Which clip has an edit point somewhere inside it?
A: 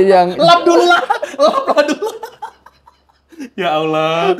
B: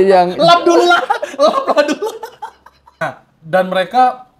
B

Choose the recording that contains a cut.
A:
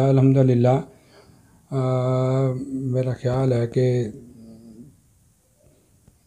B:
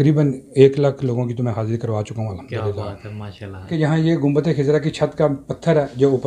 B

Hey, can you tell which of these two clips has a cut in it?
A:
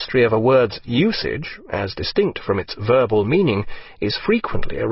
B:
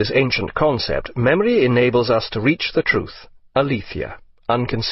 B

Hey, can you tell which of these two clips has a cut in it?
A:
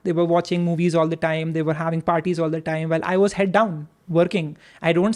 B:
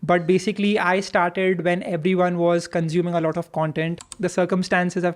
B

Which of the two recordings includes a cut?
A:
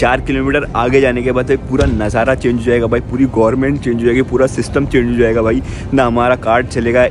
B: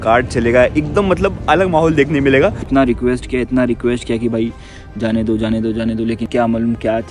B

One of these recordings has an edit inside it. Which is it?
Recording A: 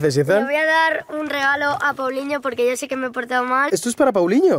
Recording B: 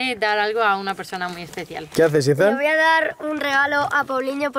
A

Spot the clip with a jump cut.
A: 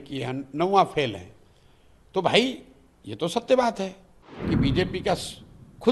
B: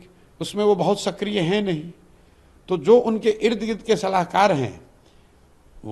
A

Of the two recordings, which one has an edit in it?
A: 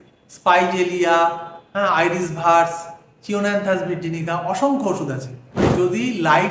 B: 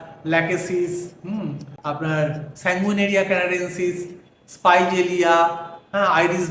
A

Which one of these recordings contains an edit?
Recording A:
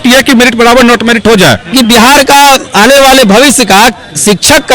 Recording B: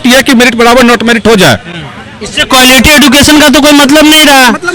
A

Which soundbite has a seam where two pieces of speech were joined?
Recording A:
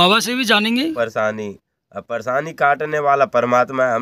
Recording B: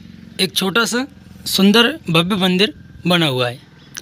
A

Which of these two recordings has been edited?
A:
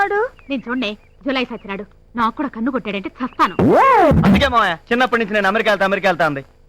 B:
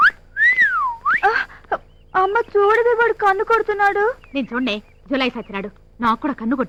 A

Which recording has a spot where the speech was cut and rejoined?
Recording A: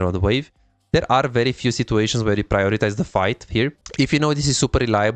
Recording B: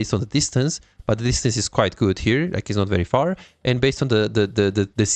A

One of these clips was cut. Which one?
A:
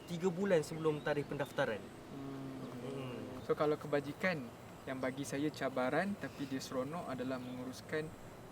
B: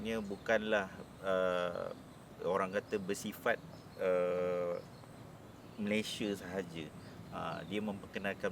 A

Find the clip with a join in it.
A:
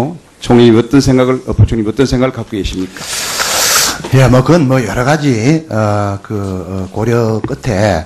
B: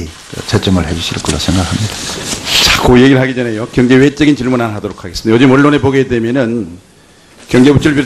B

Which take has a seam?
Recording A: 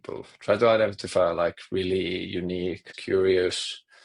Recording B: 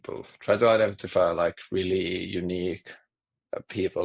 A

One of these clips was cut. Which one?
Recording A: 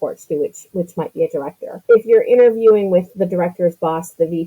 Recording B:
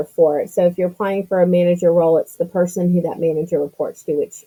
A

